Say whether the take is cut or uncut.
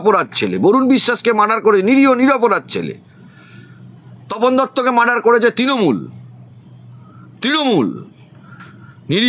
uncut